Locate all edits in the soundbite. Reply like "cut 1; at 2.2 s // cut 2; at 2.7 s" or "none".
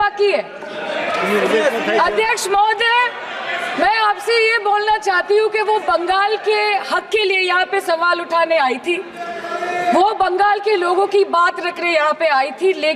none